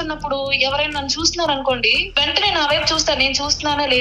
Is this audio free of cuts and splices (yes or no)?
no